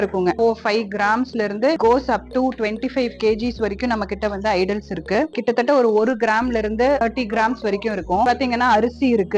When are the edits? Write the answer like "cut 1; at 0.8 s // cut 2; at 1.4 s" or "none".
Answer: cut 1; at 5.4 s // cut 2; at 7.0 s // cut 3; at 8.3 s